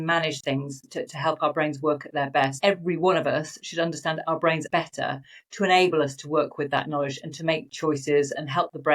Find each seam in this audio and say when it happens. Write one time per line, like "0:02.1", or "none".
0:02.6
0:04.7